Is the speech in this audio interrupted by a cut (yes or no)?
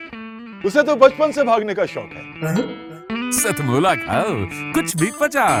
no